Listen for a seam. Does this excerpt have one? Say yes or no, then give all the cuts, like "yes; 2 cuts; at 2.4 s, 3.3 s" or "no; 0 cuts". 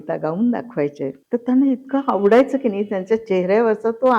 yes; 1 cut; at 1.2 s